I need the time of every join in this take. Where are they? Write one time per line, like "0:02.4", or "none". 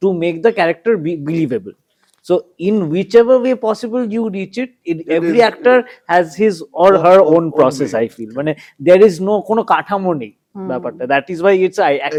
none